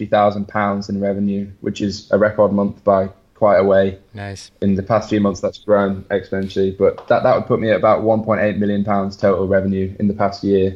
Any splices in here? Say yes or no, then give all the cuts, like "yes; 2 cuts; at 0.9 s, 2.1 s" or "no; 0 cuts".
no; 0 cuts